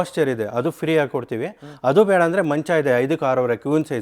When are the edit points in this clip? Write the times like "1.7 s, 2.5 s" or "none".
none